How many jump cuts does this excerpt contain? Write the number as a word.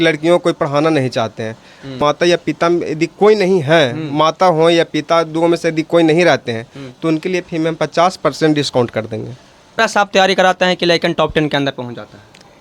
two